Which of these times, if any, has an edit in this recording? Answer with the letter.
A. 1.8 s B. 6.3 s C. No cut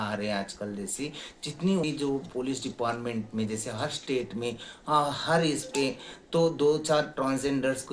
A